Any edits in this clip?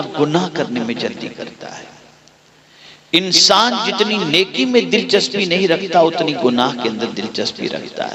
no; 0 cuts

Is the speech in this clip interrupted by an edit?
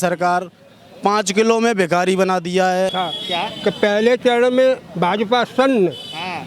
yes; 1 cut; at 2.9 s

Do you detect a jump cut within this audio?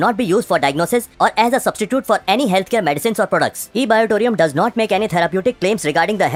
no; 0 cuts

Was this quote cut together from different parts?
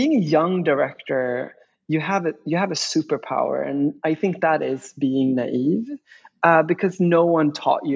no; 0 cuts

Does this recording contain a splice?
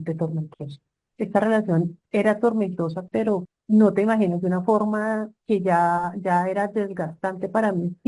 yes; 1 cut; at 3.5 s

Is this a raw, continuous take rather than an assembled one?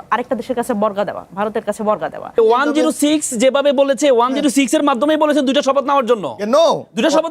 no; 1 cut; at 2.4 s

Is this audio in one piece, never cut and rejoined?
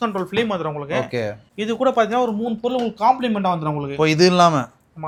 yes; 0 cuts

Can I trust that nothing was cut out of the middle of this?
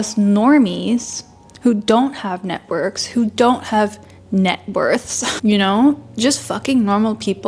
yes; 0 cuts

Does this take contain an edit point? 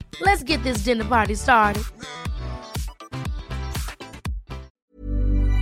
yes; 1 cut; at 4.7 s

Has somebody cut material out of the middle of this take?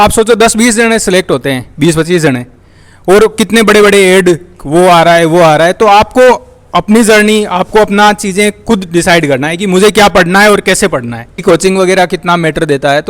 yes; 1 cut; at 11.4 s

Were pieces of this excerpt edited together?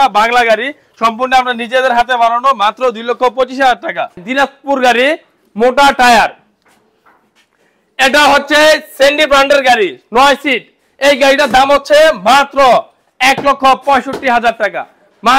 yes; 1 cut; at 4.2 s

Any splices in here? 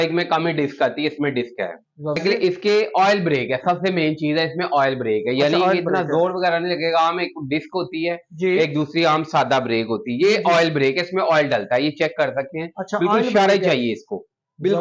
yes; 1 cut; at 2.2 s

